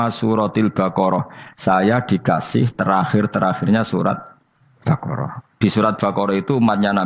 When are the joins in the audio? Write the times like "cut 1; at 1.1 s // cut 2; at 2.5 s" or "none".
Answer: none